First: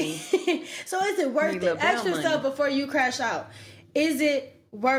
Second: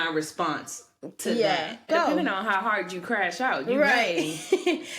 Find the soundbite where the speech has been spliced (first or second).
second